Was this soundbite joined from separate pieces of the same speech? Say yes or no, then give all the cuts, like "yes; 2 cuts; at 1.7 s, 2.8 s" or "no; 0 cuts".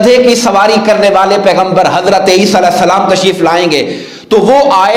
no; 0 cuts